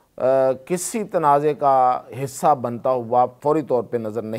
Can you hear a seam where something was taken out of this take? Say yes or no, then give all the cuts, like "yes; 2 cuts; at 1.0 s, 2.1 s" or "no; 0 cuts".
yes; 1 cut; at 3.4 s